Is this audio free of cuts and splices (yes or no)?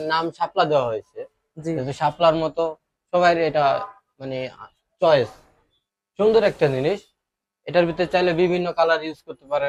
yes